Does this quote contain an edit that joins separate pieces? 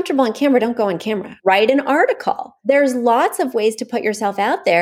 yes; 2 cuts; at 1.3 s, 2.5 s

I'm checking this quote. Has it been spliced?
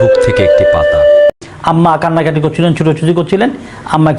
yes; 1 cut; at 1.3 s

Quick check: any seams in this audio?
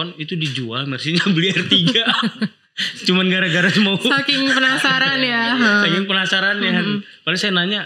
no; 0 cuts

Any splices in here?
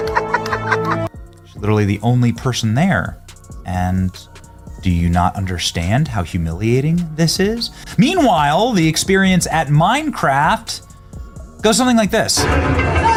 no; 0 cuts

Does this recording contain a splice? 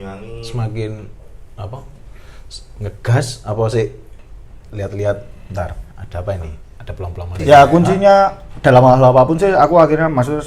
yes; 1 cut; at 7.4 s

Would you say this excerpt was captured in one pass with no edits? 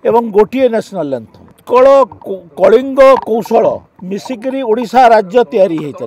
no; 1 cut; at 1.6 s

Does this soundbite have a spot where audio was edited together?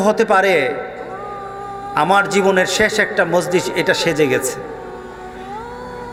no; 0 cuts

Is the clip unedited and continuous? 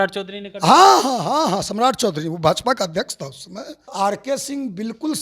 no; 1 cut; at 3.9 s

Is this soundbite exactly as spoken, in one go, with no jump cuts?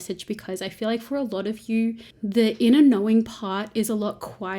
no; 1 cut; at 2.1 s

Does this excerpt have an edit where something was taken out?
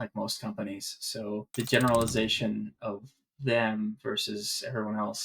yes; 1 cut; at 1.5 s

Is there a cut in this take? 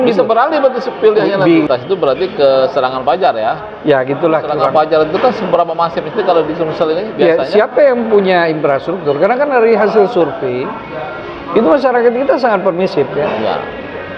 yes; 2 cuts; at 1.7 s, 4.6 s

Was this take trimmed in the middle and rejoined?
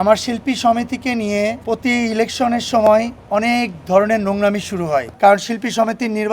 yes; 2 cuts; at 1.6 s, 5.1 s

